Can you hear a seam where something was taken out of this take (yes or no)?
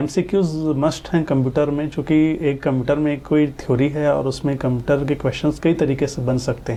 no